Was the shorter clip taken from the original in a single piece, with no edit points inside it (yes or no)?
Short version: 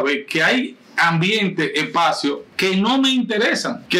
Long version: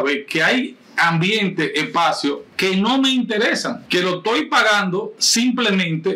yes